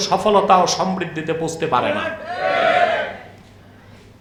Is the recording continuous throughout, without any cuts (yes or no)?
yes